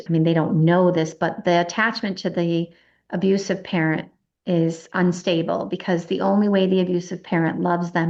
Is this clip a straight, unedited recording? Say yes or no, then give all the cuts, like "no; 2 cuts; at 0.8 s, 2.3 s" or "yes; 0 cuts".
yes; 0 cuts